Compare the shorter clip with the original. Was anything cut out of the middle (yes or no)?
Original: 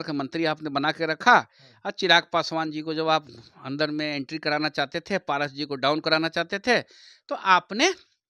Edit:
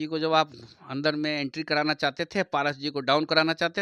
no